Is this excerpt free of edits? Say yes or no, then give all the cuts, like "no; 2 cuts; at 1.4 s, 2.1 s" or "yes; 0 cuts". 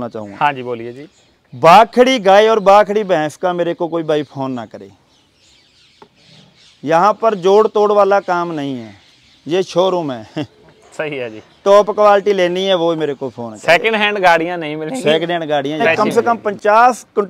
no; 1 cut; at 15.9 s